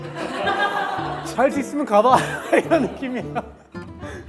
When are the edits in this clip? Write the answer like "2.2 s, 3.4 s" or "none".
1.2 s